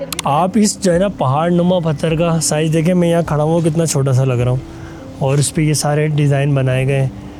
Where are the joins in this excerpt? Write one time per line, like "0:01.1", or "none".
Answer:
none